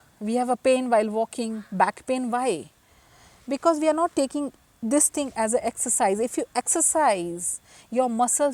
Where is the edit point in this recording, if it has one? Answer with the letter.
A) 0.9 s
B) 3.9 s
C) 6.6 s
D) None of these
D